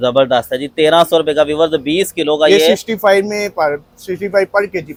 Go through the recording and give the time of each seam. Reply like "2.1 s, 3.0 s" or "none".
none